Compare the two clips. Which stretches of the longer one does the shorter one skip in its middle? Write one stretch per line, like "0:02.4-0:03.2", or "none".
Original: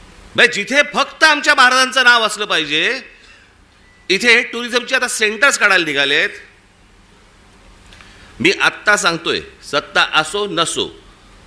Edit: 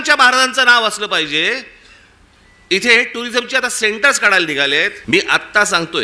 0:06.4-0:08.3